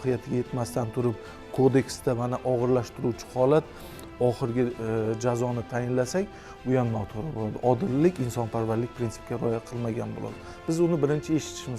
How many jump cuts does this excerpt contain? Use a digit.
0